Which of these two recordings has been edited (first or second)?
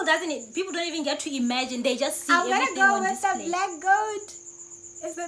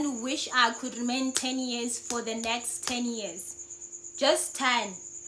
first